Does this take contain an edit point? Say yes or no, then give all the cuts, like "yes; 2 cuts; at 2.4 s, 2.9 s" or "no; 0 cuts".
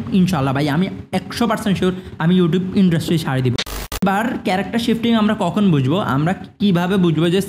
yes; 1 cut; at 3.5 s